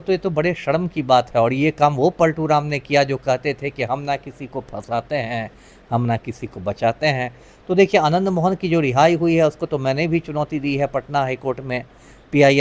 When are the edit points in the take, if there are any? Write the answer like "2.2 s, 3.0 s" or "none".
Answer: none